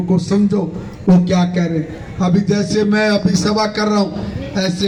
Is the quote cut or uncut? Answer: uncut